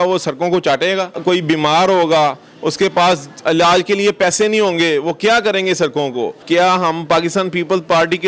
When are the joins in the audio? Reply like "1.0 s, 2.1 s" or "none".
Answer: 1.2 s, 6.4 s